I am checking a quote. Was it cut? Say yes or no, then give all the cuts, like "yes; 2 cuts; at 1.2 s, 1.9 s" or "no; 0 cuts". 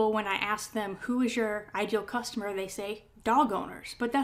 no; 0 cuts